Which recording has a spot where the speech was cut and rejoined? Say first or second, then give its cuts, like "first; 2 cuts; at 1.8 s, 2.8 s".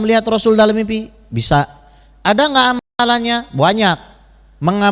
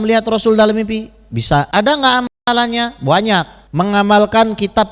second; 2 cuts; at 1.7 s, 3.6 s